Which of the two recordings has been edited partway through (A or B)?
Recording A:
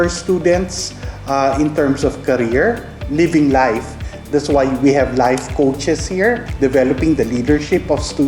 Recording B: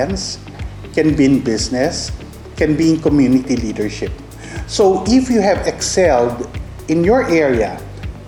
A